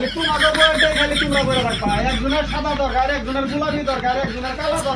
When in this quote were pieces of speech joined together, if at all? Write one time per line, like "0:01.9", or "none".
none